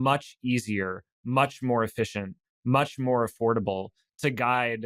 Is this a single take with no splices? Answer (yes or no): yes